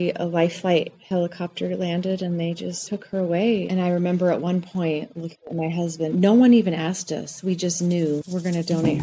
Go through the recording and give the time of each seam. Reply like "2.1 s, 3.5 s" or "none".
3.7 s